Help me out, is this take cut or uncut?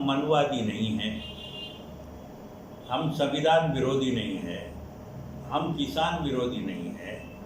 uncut